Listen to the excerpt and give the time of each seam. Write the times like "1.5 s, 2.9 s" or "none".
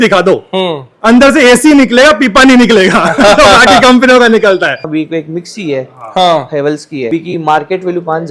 4.8 s, 7.1 s